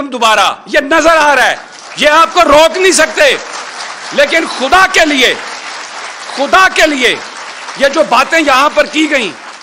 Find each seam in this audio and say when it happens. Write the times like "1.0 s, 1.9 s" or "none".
none